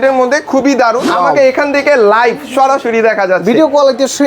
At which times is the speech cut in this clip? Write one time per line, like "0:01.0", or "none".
0:01.1